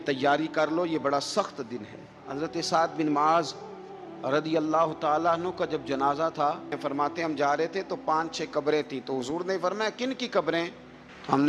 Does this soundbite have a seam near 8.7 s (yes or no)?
no